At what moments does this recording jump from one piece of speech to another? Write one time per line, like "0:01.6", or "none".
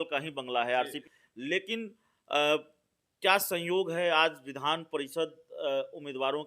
0:01.0